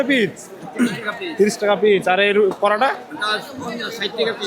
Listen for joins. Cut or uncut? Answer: uncut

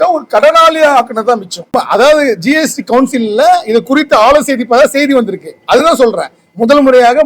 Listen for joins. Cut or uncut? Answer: cut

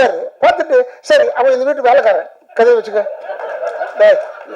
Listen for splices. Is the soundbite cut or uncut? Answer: uncut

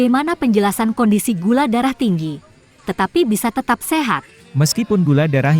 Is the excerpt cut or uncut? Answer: uncut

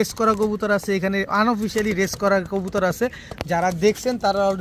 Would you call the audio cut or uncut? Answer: uncut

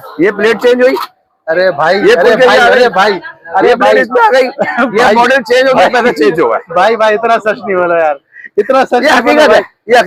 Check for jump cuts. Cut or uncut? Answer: uncut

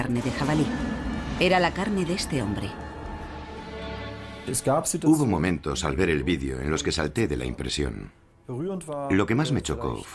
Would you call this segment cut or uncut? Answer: cut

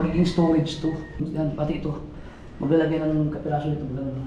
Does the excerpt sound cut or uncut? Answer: cut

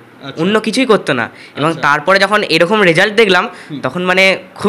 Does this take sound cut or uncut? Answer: uncut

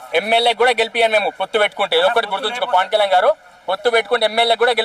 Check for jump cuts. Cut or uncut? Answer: uncut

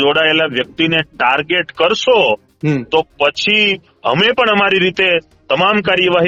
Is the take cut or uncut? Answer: uncut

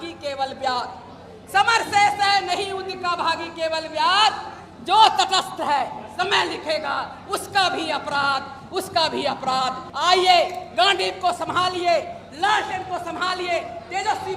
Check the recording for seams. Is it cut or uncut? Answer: cut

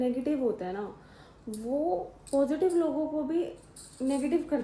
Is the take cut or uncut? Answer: uncut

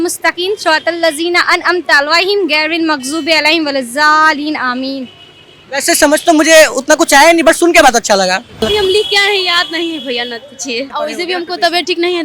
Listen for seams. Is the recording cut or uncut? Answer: cut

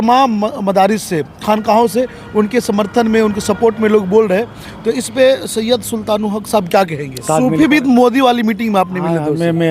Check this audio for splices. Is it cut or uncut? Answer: cut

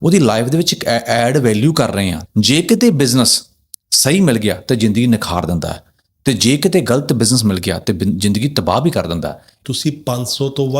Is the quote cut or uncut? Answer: cut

